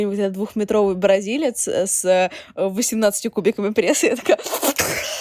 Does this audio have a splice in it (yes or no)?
no